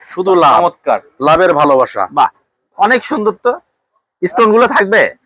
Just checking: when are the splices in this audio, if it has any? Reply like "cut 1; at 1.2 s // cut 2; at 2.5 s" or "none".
none

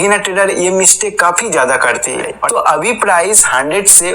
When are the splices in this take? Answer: cut 1; at 2.4 s

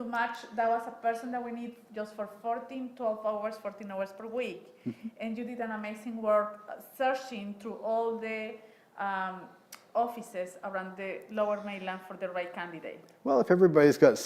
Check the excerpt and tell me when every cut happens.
none

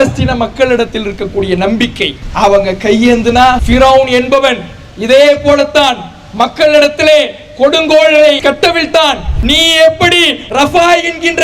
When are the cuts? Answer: cut 1; at 3.6 s // cut 2; at 8.9 s // cut 3; at 10.4 s

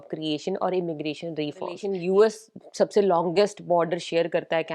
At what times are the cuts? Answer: cut 1; at 1.9 s

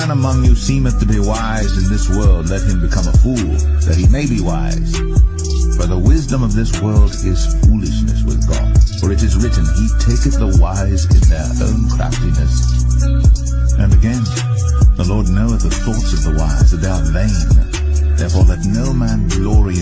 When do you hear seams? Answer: cut 1; at 11.3 s

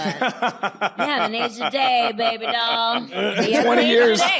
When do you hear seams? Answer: cut 1; at 3.2 s

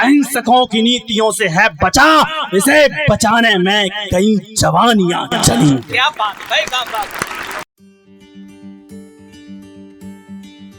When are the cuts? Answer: cut 1; at 7.6 s

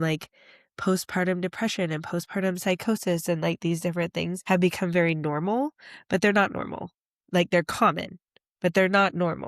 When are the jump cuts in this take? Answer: cut 1; at 4.4 s

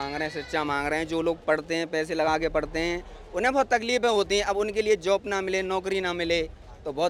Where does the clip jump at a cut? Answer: none

